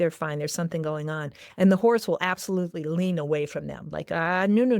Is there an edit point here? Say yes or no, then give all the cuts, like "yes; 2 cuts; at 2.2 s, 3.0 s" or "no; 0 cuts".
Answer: no; 0 cuts